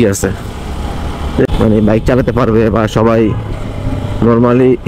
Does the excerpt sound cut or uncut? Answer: cut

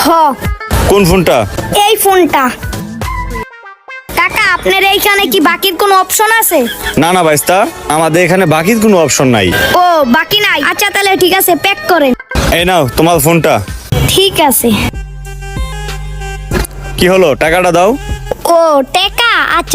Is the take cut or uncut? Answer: cut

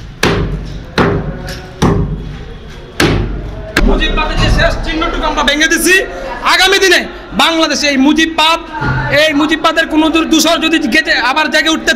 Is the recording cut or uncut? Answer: cut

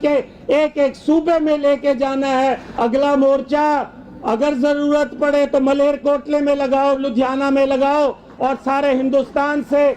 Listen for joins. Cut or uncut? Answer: cut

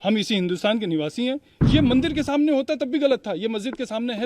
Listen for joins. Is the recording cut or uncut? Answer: cut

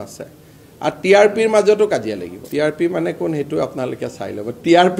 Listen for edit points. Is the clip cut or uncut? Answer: cut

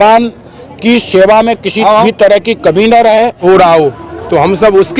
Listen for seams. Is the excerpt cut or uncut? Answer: cut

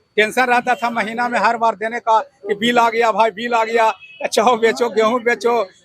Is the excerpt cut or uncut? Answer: uncut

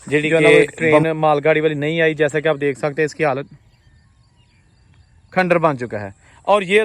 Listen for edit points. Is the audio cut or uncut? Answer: cut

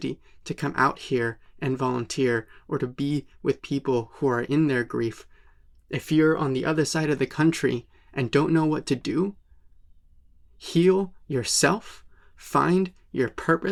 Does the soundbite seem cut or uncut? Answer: uncut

